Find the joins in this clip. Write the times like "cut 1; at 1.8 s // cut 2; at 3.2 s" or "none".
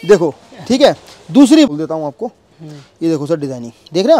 cut 1; at 1.7 s